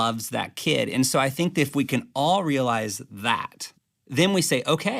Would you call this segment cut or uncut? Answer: cut